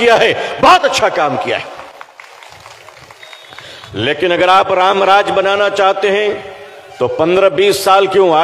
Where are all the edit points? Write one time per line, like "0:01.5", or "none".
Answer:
0:02.1